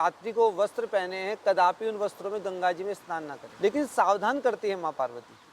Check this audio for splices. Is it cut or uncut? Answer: cut